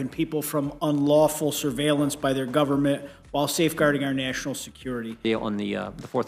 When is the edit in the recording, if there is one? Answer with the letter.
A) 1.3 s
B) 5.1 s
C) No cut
B